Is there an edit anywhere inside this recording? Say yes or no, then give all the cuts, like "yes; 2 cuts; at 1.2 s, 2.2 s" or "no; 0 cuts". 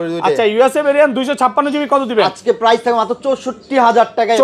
no; 0 cuts